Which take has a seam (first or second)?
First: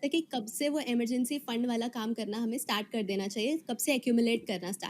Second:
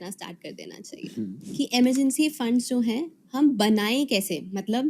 second